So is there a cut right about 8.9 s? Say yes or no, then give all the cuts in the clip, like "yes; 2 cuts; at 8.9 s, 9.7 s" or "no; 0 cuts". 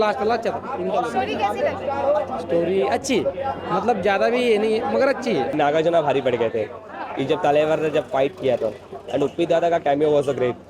no; 1 cut; at 5.5 s